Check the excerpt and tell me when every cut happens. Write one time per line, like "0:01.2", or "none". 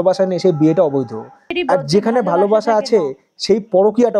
none